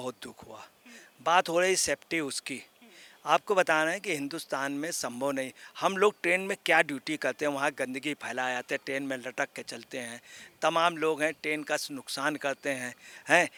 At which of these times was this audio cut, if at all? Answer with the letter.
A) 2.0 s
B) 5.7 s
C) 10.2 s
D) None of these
D